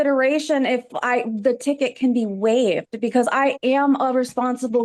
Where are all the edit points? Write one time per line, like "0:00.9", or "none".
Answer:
none